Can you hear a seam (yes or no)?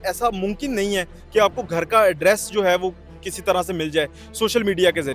no